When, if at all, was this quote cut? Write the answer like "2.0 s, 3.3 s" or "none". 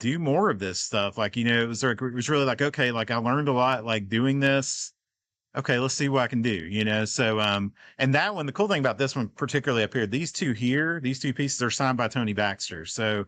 none

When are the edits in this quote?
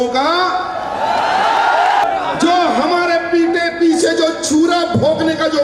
2.0 s

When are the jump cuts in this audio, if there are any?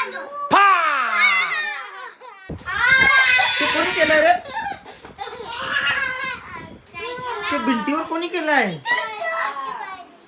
2.5 s

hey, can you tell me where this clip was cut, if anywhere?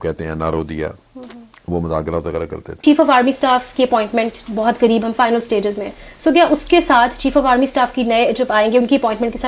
2.8 s

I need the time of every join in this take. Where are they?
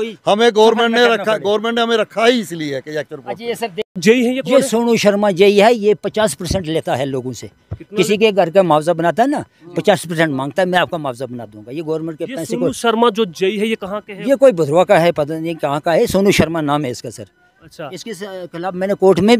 4.0 s

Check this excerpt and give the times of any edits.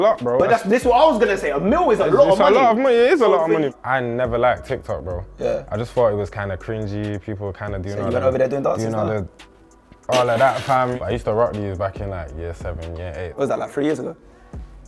3.7 s, 10.9 s, 13.7 s

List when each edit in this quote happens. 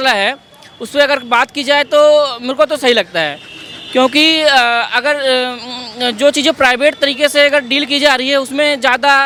none

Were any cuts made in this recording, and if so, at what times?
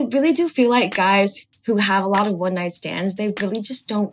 1.5 s

